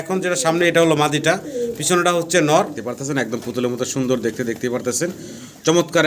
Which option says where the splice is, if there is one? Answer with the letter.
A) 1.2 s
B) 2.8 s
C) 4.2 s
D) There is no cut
B